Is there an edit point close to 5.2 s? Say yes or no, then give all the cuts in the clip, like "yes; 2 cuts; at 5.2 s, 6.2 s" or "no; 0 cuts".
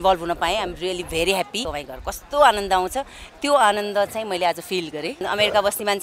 yes; 2 cuts; at 1.7 s, 5.2 s